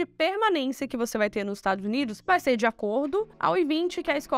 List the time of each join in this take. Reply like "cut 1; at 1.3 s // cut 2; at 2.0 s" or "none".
none